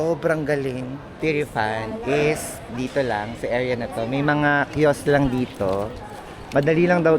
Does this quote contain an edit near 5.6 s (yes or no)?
no